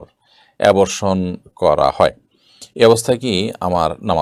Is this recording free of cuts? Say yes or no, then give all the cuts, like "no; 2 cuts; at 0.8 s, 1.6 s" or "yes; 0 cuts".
yes; 0 cuts